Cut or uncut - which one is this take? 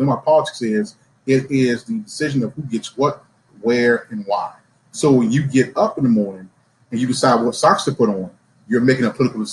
uncut